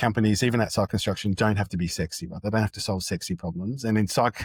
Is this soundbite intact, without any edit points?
yes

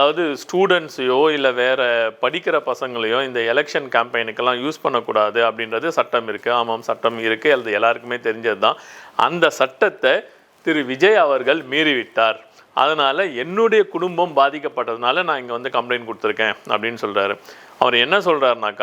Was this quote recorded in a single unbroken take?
yes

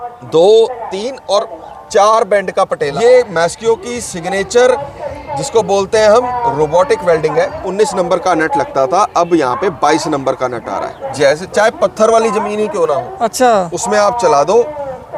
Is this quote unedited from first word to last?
no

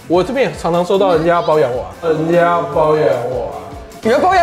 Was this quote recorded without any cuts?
yes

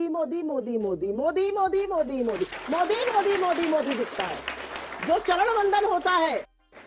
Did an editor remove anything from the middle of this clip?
no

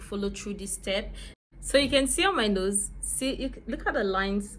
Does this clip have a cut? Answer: yes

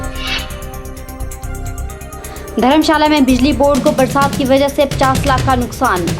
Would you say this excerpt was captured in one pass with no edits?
yes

